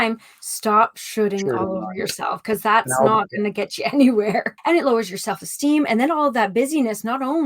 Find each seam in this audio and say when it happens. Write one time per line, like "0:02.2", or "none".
0:04.5